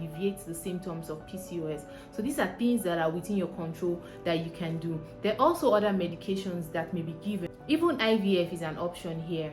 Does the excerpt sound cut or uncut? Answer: cut